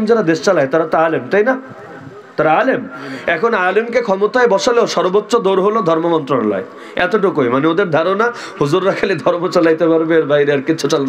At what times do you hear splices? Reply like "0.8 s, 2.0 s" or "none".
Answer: none